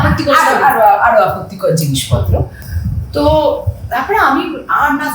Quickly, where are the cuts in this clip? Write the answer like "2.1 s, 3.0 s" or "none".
none

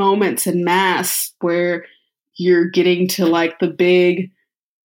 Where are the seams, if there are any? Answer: 2.2 s

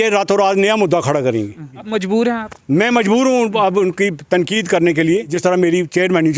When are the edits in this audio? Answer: 1.8 s, 5.3 s

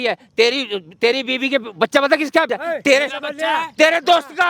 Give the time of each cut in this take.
2.5 s

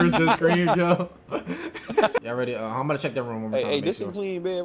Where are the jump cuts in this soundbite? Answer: 2.2 s

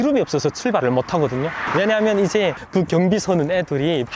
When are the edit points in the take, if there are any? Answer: none

